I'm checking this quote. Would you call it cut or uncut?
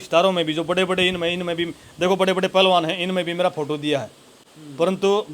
uncut